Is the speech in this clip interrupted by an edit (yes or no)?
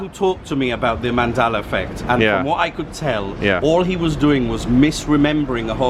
no